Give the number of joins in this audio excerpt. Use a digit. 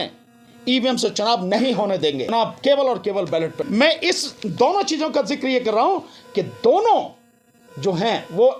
2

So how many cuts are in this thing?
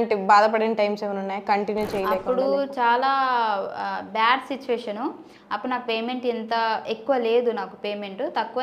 0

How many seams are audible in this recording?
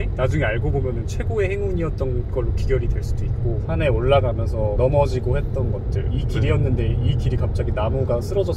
1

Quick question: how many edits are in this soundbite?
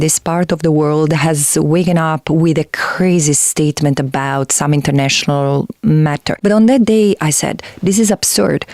1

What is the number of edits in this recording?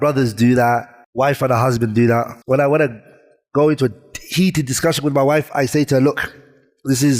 2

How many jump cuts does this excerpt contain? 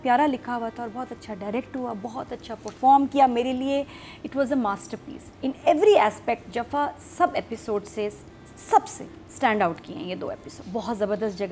1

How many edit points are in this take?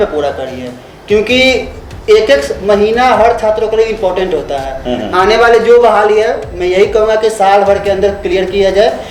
0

